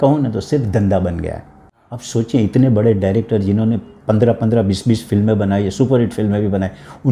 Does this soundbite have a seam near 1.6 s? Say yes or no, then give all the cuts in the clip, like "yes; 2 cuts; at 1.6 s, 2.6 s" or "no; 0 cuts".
yes; 1 cut; at 1.6 s